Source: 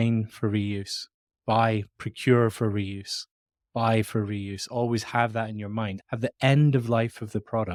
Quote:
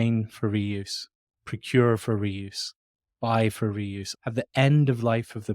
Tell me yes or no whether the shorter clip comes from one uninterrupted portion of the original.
no